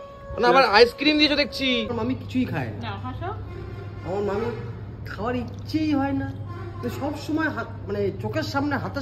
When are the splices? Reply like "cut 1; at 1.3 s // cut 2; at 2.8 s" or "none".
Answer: cut 1; at 1.9 s